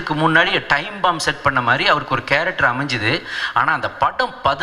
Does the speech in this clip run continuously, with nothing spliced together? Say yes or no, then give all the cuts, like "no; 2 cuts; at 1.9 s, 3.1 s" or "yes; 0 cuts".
yes; 0 cuts